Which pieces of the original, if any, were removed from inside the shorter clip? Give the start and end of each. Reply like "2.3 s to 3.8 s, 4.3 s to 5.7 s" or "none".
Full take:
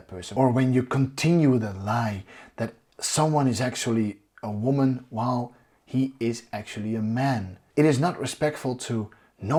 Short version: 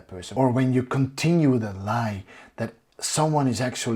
none